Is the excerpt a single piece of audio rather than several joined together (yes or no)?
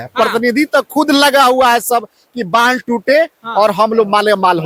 yes